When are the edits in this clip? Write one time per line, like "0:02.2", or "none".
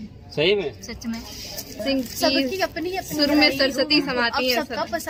none

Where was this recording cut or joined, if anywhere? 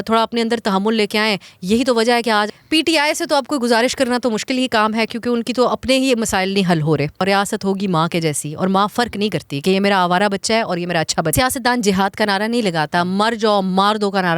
0:02.4
0:07.2
0:11.3

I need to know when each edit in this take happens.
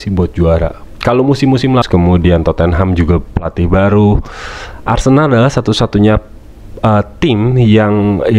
0:01.8

